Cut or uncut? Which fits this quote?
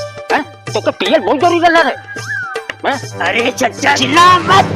cut